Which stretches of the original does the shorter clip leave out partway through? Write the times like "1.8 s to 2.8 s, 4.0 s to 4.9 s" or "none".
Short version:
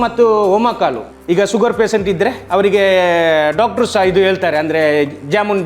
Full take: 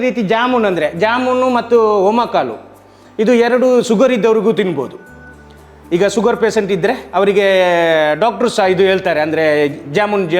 2.6 s to 5.7 s